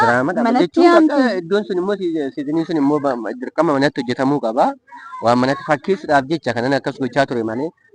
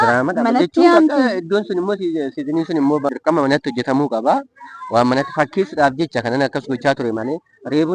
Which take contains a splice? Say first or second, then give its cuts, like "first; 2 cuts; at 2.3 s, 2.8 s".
second; 1 cut; at 3.1 s